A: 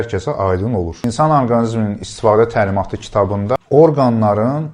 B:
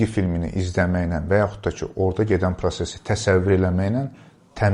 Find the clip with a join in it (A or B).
A